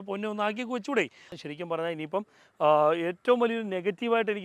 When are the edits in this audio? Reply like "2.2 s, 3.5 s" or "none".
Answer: 1.3 s